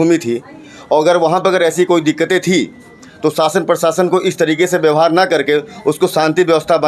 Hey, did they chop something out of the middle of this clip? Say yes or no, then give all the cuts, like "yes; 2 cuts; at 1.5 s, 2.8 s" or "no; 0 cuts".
no; 0 cuts